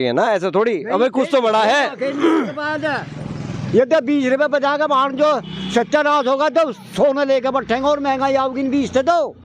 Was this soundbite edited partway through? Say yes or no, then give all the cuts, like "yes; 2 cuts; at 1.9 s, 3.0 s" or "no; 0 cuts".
no; 0 cuts